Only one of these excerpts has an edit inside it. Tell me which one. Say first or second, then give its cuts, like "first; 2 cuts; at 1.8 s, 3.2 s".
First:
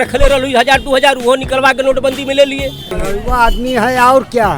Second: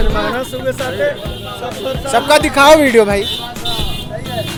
first; 1 cut; at 3.0 s